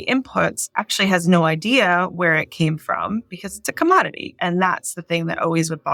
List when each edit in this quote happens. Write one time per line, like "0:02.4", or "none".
none